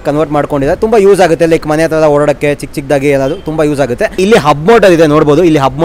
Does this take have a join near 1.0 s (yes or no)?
no